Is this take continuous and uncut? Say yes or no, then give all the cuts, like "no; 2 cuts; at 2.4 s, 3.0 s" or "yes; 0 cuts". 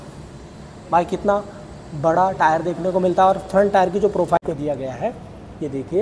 no; 1 cut; at 4.4 s